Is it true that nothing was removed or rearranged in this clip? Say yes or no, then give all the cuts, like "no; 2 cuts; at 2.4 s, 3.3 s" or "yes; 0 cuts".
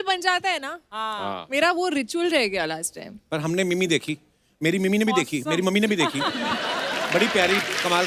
yes; 0 cuts